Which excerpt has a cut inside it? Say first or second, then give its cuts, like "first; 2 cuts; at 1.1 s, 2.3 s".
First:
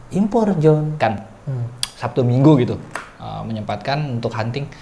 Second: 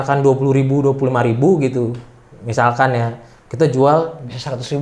first; 1 cut; at 1.3 s